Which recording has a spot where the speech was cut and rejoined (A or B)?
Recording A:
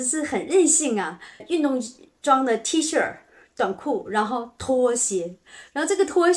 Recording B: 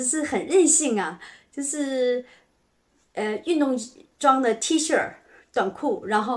A